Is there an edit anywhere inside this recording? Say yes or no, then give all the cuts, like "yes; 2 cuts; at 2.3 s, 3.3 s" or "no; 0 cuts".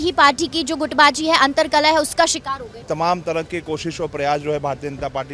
yes; 1 cut; at 2.8 s